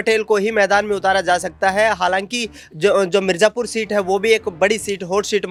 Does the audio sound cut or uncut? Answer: uncut